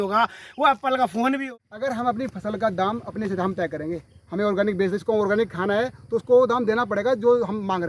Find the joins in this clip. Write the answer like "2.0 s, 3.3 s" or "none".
1.4 s